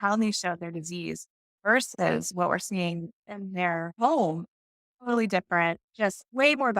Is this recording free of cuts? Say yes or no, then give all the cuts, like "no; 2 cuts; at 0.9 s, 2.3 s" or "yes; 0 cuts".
no; 2 cuts; at 1.9 s, 3.9 s